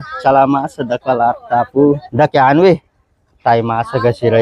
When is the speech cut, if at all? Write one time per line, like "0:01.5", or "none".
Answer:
0:02.1